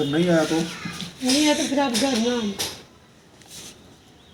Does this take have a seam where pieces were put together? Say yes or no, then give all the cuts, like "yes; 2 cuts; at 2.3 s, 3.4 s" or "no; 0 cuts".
no; 0 cuts